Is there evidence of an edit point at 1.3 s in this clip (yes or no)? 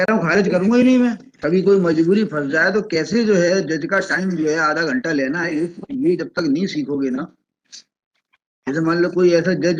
yes